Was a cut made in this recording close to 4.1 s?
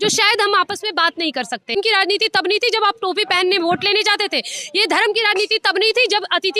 no; 1 cut; at 1.7 s

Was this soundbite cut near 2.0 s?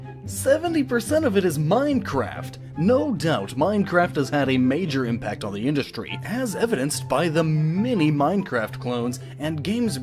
yes; 1 cut; at 2.0 s

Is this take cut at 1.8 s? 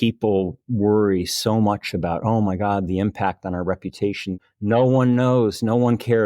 no; 1 cut; at 4.4 s

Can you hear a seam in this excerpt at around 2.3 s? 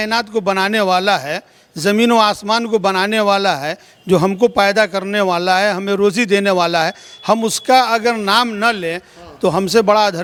no; 0 cuts

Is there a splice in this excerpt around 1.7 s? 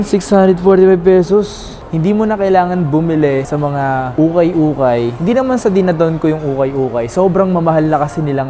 yes; 1 cut; at 1.7 s

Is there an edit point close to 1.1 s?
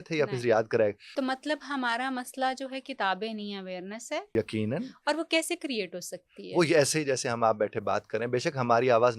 yes; 2 cuts; at 1.1 s, 4.3 s

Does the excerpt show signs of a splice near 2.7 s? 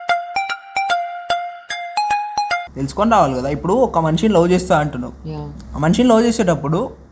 yes; 1 cut; at 2.7 s

